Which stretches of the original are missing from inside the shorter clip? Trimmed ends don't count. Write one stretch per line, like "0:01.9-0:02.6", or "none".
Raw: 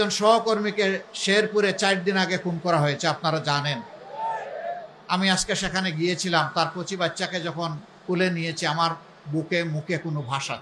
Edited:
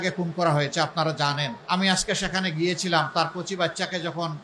0:03.8-0:05.0